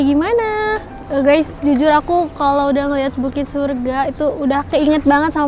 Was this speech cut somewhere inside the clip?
no; 0 cuts

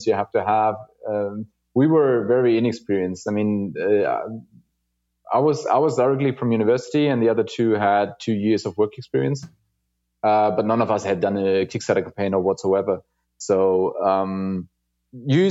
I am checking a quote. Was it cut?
no; 0 cuts

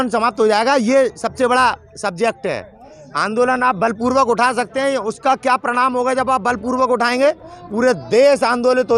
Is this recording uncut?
yes; 0 cuts

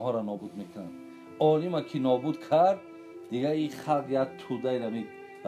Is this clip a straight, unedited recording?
yes; 0 cuts

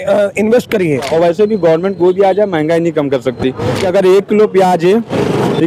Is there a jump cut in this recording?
yes; 2 cuts; at 1.1 s, 3.8 s

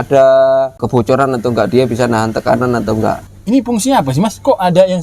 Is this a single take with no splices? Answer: no; 2 cuts; at 0.8 s, 3.3 s

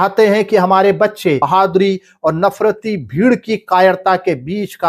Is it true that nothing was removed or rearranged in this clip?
no; 1 cut; at 1.4 s

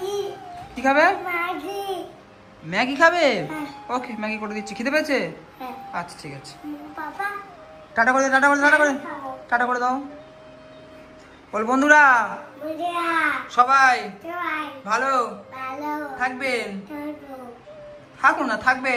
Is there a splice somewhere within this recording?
no; 0 cuts

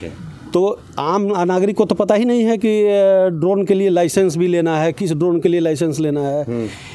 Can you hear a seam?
no; 0 cuts

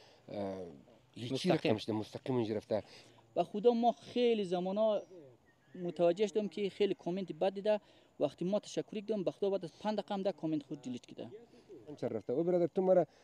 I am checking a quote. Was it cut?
yes; 2 cuts; at 3.0 s, 12.0 s

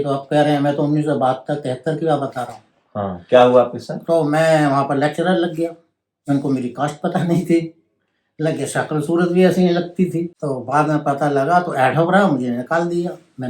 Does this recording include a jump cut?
yes; 1 cut; at 10.3 s

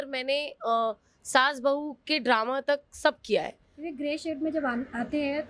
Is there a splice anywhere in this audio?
no; 0 cuts

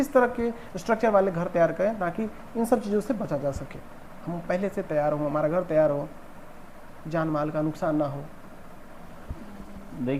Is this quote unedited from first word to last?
yes; 0 cuts

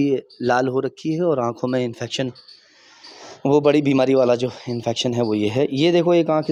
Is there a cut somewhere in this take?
no; 0 cuts

